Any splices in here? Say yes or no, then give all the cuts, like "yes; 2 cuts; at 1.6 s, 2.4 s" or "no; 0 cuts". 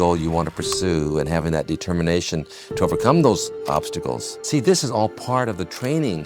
yes; 1 cut; at 4.3 s